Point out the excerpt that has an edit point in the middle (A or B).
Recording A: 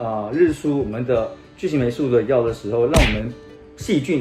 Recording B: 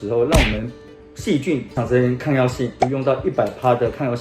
B